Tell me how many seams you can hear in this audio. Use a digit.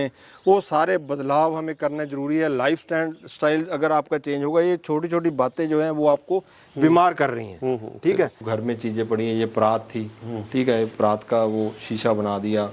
1